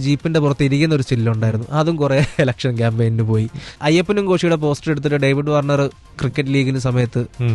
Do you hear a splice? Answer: yes; 2 cuts; at 3.8 s, 6.2 s

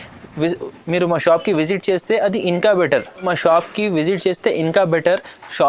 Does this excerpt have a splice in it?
no; 0 cuts

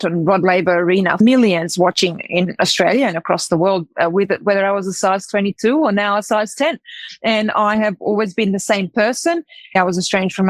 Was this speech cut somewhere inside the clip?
yes; 2 cuts; at 1.2 s, 9.7 s

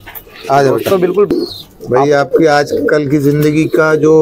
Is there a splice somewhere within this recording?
yes; 1 cut; at 1.3 s

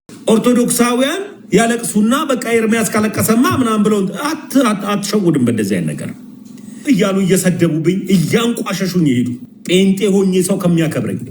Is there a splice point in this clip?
yes; 2 cuts; at 6.8 s, 9.5 s

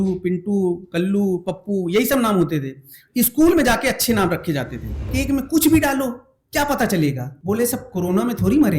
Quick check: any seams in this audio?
yes; 2 cuts; at 5.1 s, 7.3 s

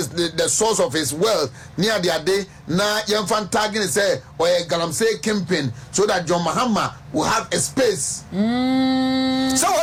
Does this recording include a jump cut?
no; 0 cuts

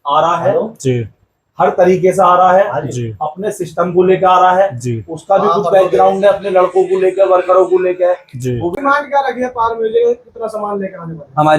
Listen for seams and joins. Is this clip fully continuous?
no; 1 cut; at 8.7 s

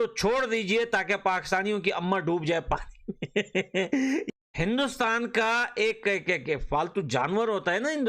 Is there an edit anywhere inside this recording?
yes; 1 cut; at 4.3 s

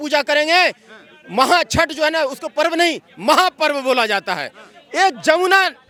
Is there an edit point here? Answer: no; 0 cuts

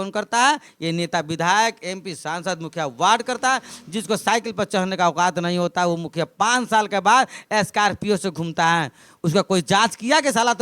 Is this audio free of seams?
yes; 0 cuts

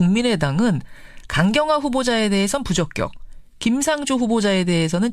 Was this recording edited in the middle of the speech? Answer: yes; 1 cut; at 0.9 s

